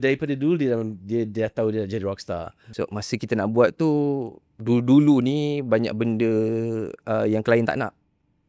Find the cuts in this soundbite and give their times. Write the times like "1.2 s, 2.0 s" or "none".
2.6 s